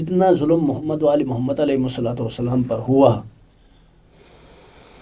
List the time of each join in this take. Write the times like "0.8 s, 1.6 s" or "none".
none

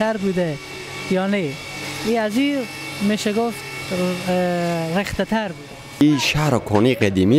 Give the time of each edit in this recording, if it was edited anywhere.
6.0 s

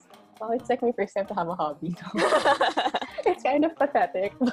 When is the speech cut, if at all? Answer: none

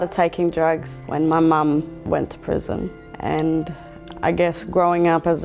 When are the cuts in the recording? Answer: 1.0 s, 2.0 s, 3.0 s

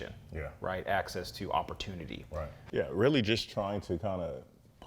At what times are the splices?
2.6 s

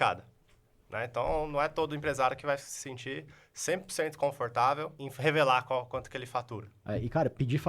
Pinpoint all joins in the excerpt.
5.0 s, 6.8 s

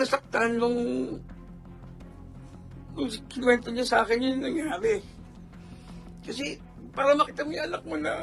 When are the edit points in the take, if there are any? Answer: 1.2 s, 2.9 s

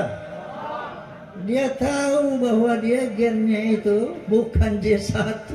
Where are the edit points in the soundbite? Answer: 4.2 s

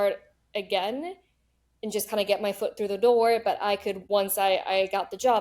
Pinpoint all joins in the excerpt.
3.9 s

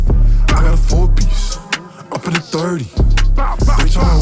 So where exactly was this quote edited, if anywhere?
none

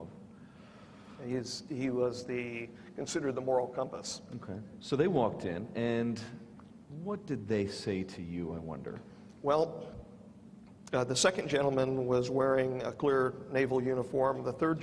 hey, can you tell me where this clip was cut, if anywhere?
none

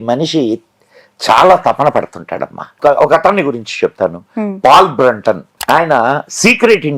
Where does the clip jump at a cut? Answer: 2.7 s, 5.5 s

